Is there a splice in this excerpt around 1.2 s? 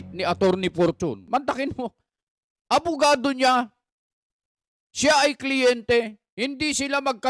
yes; 1 cut; at 1.2 s

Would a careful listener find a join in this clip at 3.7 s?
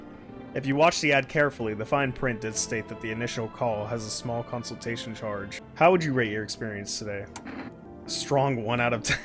no; 2 cuts; at 5.6 s, 7.9 s

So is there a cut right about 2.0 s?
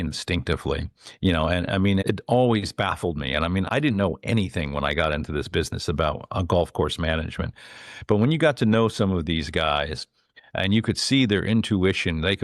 yes; 2 cuts; at 2.0 s, 3.7 s

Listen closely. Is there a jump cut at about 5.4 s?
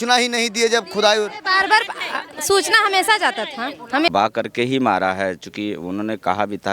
no; 1 cut; at 4.1 s

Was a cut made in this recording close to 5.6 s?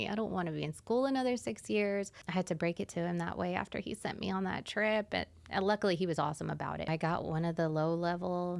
no; 2 cuts; at 2.2 s, 6.9 s

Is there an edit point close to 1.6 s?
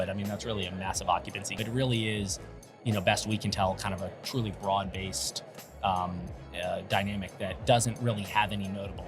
yes; 1 cut; at 1.6 s

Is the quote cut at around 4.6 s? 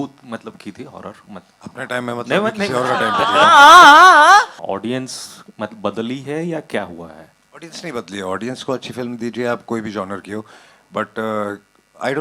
yes; 1 cut; at 4.6 s

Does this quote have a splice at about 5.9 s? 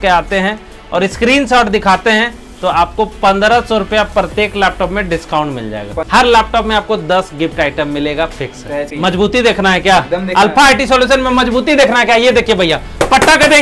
yes; 2 cuts; at 5.9 s, 8.9 s

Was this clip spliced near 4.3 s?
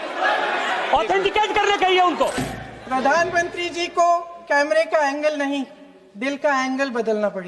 no; 1 cut; at 2.4 s

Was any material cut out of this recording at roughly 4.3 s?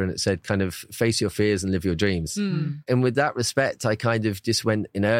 no; 1 cut; at 2.9 s

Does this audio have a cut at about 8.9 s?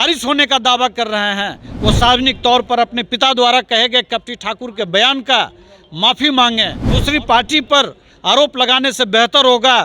no; 1 cut; at 6.9 s

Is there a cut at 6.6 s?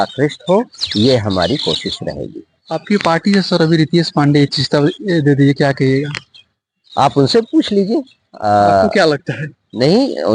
no; 0 cuts

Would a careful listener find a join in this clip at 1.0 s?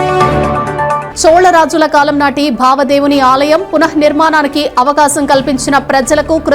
yes; 1 cut; at 1.0 s

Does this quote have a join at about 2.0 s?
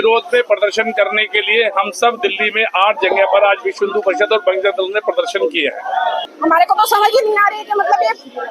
no; 1 cut; at 6.3 s

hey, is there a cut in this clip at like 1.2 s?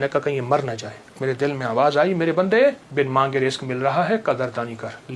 yes; 2 cuts; at 1.2 s, 2.8 s

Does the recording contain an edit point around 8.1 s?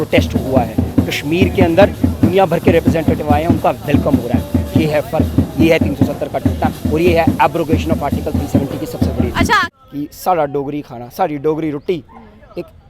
no; 1 cut; at 9.6 s

